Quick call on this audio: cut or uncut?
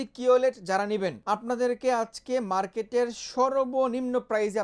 cut